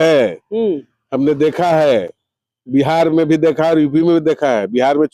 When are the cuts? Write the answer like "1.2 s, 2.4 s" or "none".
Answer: none